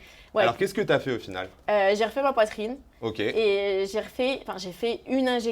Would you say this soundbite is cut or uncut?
uncut